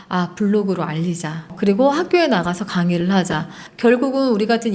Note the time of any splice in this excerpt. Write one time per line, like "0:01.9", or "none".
0:03.6